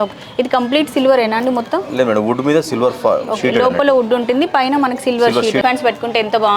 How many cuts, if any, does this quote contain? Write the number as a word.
one